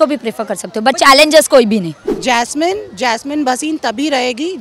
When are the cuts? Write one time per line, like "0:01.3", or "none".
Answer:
0:02.1

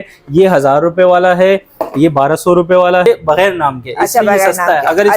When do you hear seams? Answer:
0:03.1

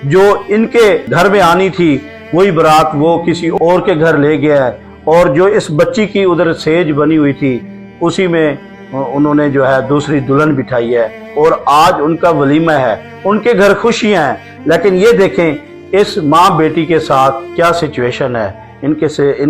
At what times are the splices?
none

